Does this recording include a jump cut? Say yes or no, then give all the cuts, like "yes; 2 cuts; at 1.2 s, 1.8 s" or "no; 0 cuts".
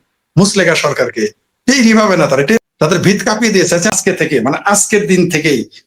yes; 2 cuts; at 2.6 s, 3.9 s